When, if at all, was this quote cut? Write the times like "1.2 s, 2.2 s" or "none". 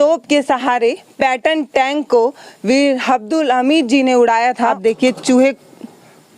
4.7 s